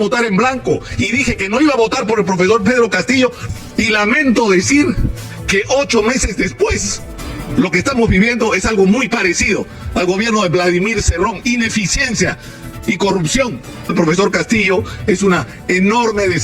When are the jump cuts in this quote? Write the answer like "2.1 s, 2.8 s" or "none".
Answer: 3.4 s, 13.9 s